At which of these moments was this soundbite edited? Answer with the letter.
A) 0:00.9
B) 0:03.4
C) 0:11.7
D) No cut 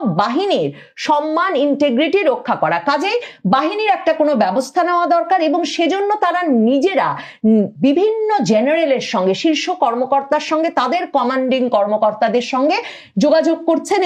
D